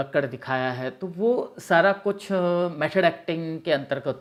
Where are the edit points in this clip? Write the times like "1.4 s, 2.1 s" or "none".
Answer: none